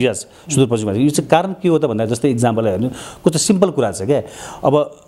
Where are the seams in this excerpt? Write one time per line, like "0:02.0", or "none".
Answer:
none

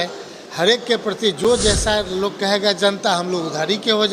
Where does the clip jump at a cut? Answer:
none

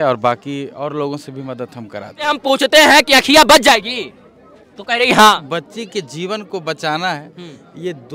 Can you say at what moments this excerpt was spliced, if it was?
0:02.3
0:05.5

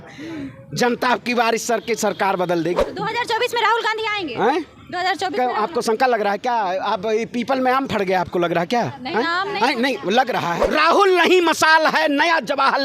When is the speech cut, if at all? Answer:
0:02.8
0:10.6

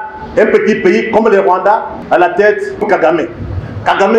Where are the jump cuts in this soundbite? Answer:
0:01.9

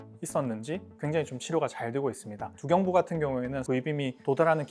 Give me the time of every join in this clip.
0:03.6

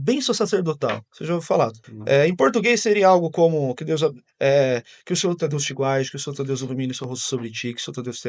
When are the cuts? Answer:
0:01.4

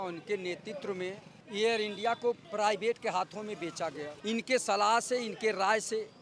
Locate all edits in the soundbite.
0:01.3
0:02.4
0:04.1

